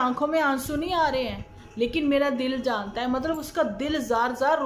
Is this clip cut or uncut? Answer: uncut